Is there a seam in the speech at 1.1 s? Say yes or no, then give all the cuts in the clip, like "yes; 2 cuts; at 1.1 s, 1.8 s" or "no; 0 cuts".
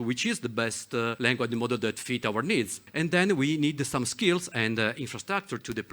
yes; 2 cuts; at 1.1 s, 2.8 s